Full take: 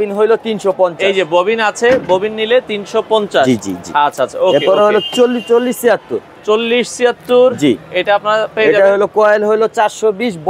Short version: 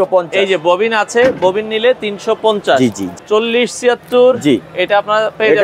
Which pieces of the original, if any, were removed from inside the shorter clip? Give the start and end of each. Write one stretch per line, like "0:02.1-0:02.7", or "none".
0:03.8-0:06.3